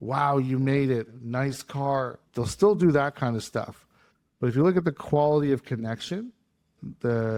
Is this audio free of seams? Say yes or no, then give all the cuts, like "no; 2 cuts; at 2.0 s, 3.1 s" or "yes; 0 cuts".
yes; 0 cuts